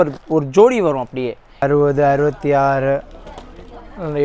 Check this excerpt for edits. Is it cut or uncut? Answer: cut